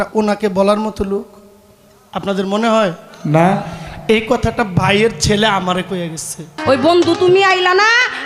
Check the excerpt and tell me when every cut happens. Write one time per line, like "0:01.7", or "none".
0:06.5